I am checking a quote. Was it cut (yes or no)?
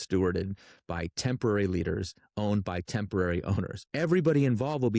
yes